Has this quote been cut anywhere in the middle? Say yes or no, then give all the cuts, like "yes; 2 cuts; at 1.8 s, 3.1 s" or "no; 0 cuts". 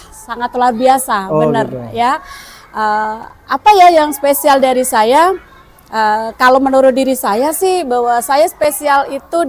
no; 0 cuts